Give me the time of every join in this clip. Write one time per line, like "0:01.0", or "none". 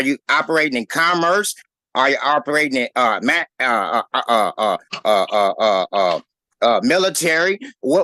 none